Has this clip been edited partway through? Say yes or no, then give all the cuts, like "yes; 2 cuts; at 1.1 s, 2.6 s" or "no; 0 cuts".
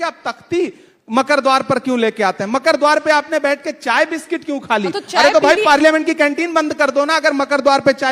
no; 0 cuts